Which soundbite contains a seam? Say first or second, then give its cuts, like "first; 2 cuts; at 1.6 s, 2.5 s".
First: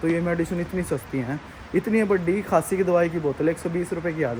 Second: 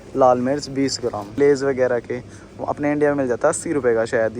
second; 1 cut; at 1.3 s